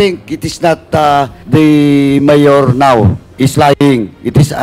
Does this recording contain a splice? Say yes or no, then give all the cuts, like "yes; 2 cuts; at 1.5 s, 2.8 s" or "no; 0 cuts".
yes; 2 cuts; at 1.4 s, 3.2 s